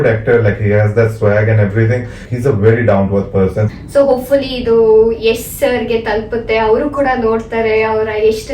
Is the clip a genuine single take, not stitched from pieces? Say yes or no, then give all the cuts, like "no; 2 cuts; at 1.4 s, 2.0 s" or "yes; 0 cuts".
no; 2 cuts; at 2.2 s, 3.7 s